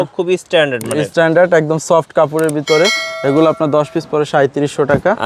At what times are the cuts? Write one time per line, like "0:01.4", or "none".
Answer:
none